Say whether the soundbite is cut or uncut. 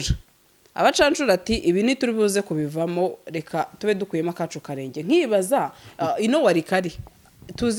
uncut